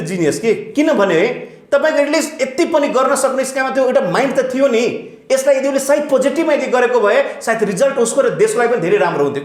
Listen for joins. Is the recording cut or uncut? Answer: uncut